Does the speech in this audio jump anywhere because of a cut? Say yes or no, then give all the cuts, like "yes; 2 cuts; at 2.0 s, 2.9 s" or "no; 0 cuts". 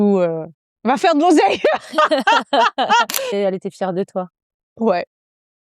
yes; 1 cut; at 3.3 s